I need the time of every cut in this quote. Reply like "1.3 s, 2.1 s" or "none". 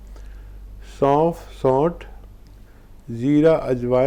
none

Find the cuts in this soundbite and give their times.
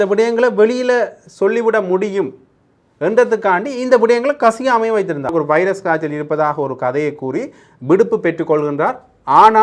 5.3 s

